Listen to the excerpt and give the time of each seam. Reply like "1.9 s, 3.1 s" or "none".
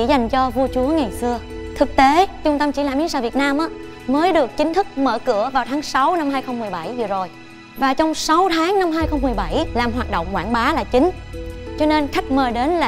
none